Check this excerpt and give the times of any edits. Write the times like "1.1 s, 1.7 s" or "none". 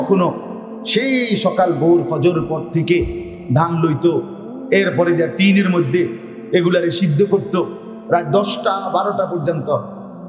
none